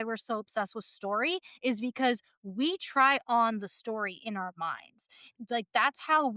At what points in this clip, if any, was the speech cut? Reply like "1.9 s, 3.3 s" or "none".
5.3 s